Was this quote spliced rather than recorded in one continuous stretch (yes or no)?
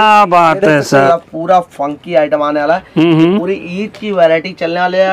yes